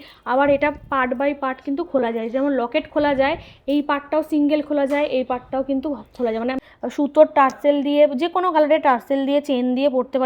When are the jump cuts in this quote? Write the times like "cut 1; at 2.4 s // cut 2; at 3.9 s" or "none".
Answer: cut 1; at 6.6 s